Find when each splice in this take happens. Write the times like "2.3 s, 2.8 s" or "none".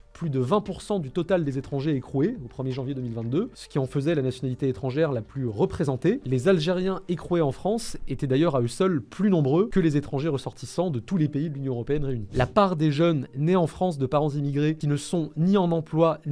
12.3 s, 14.8 s